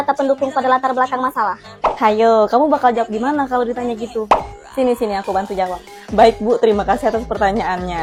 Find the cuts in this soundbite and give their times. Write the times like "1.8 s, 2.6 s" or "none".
none